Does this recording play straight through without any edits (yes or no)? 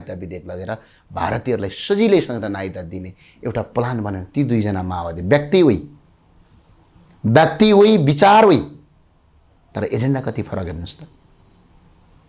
yes